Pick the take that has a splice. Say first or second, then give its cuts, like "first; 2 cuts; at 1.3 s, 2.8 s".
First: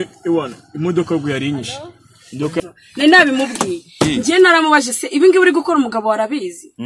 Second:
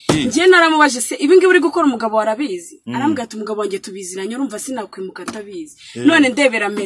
first; 1 cut; at 2.6 s